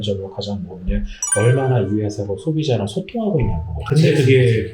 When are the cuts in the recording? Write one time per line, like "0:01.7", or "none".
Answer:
0:03.7